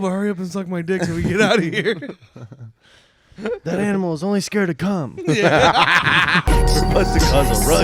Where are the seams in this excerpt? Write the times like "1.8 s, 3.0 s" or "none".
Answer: 6.4 s